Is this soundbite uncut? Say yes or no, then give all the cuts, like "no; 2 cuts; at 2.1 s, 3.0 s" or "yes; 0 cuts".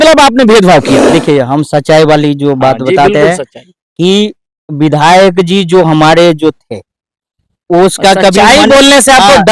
no; 1 cut; at 1.0 s